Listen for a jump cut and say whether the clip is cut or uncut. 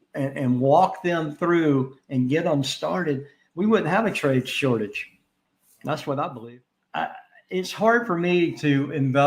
cut